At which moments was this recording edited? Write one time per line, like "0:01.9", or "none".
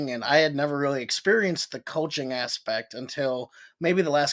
none